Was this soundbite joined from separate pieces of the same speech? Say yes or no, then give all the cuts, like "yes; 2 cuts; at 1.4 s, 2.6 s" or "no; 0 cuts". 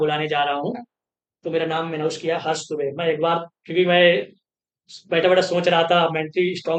no; 0 cuts